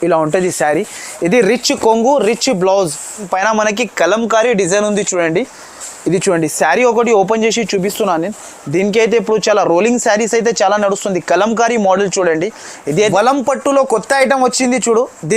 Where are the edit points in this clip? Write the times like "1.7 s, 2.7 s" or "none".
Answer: 3.3 s, 13.0 s